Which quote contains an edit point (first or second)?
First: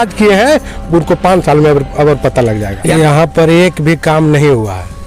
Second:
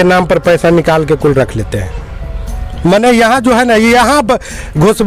first